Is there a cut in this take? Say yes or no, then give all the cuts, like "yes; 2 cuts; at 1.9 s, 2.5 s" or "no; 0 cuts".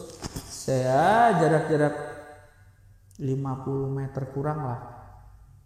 no; 0 cuts